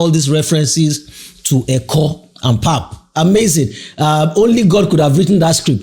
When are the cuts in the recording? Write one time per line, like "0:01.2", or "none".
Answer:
none

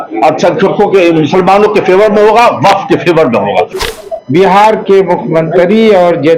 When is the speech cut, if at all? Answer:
0:03.8

